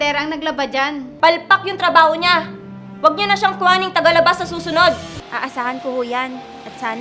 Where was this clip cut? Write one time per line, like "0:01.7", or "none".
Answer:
0:01.1
0:05.1